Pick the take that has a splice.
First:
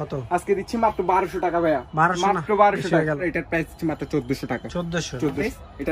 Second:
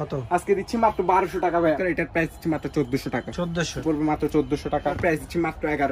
second; 3 cuts; at 1.8 s, 3.8 s, 5.0 s

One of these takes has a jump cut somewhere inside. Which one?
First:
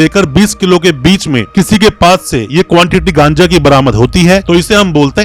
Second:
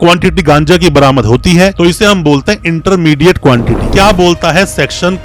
second; 1 cut; at 3.8 s

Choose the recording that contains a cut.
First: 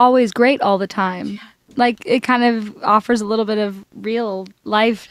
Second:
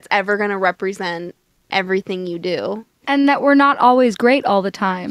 second; 1 cut; at 2.9 s

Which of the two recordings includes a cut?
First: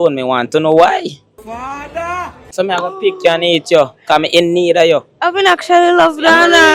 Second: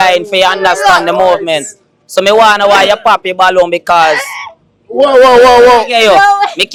first; 1 cut; at 1.9 s

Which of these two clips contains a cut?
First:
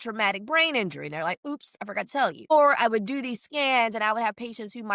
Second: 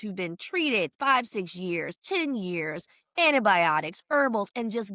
first; 1 cut; at 2.5 s

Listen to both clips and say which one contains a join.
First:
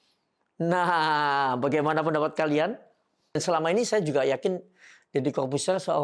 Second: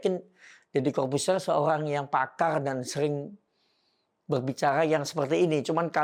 first; 1 cut; at 3.4 s

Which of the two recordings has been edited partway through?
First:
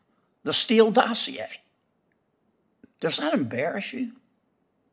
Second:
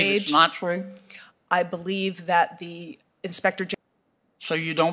second; 1 cut; at 3.7 s

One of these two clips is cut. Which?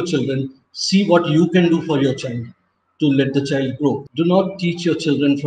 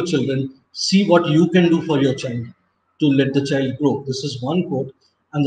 first; 1 cut; at 4.1 s

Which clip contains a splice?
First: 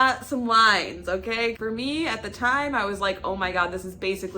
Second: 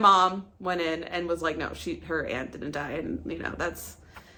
first; 1 cut; at 1.6 s

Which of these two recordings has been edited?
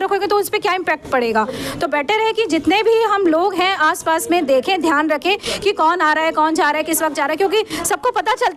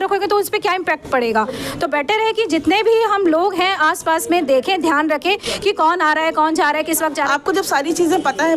second; 1 cut; at 7.2 s

